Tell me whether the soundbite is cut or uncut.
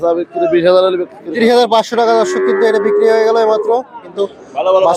cut